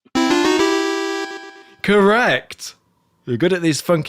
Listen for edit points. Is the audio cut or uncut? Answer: uncut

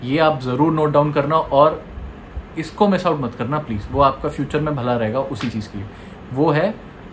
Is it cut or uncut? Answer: uncut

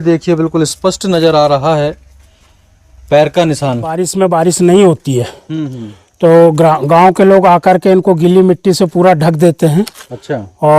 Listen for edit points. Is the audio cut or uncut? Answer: cut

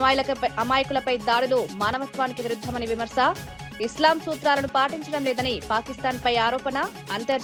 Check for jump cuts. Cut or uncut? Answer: uncut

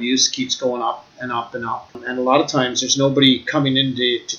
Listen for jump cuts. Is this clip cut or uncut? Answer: cut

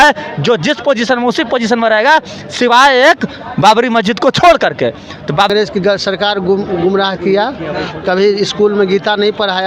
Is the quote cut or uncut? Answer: cut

